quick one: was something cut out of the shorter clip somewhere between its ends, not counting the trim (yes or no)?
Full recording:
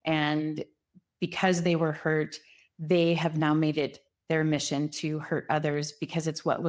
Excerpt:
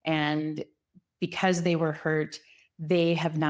no